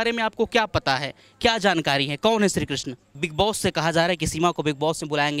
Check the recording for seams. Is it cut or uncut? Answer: cut